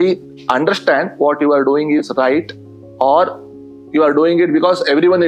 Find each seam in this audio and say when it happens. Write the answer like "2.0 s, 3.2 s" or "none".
none